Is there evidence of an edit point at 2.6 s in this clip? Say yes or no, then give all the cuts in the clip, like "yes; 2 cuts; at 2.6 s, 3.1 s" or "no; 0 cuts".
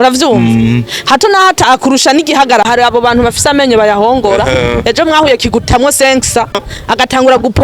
yes; 2 cuts; at 2.6 s, 6.7 s